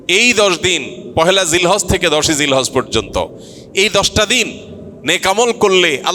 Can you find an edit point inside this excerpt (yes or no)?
no